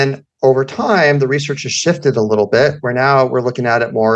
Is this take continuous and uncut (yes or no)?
yes